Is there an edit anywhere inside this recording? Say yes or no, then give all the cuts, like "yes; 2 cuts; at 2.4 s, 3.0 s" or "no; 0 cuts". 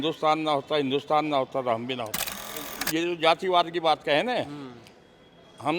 yes; 1 cut; at 2.6 s